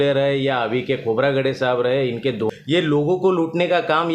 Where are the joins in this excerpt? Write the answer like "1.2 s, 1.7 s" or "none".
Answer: 2.5 s